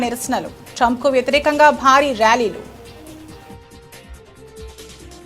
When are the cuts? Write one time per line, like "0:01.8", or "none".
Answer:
0:02.7